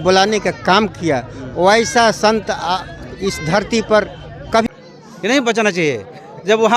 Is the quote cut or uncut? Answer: cut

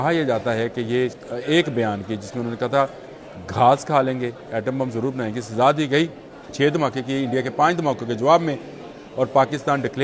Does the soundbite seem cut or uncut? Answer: cut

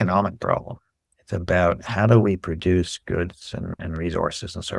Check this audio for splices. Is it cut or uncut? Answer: uncut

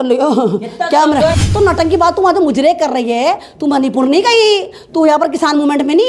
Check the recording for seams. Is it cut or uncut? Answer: cut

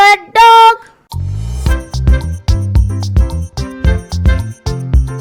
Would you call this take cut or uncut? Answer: uncut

